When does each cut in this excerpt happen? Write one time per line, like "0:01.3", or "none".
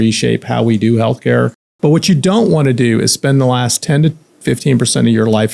0:01.6